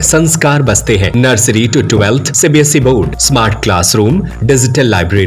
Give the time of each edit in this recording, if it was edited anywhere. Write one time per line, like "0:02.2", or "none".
0:01.1
0:02.3
0:03.2
0:04.3

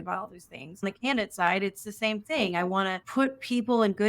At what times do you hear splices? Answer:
0:00.9
0:03.0

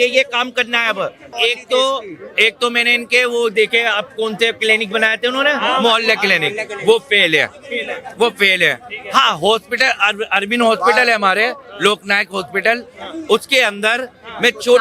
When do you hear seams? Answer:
0:01.3

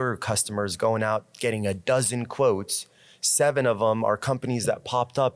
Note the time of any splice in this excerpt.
none

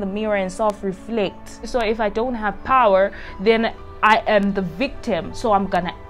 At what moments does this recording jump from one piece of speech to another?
0:01.7

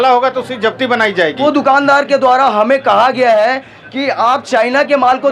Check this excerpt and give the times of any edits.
0:01.4

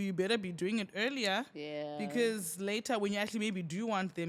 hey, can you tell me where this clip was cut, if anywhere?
none

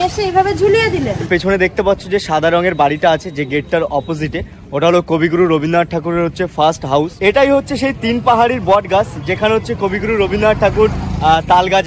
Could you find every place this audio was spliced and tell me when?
0:01.3
0:07.1

